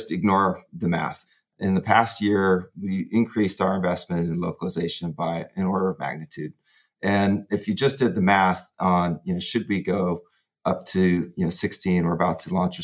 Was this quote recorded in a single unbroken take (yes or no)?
no